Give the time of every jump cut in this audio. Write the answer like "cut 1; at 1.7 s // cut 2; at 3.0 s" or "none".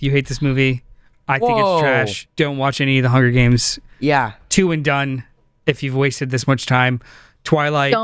cut 1; at 2.2 s